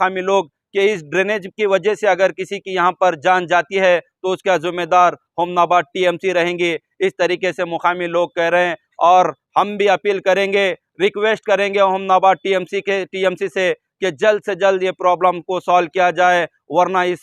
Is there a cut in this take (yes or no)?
no